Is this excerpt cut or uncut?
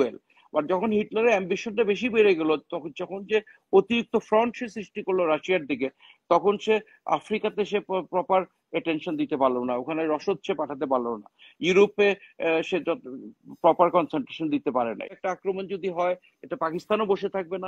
cut